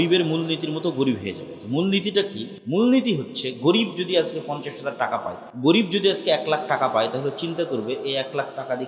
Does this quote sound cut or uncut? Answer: cut